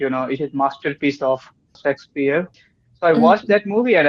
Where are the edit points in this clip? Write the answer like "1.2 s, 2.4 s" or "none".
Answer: 1.8 s, 2.6 s